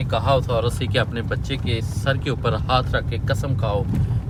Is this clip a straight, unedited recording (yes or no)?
yes